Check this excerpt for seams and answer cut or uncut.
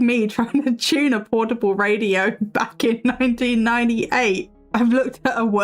cut